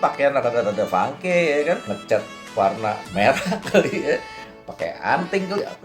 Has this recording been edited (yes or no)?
yes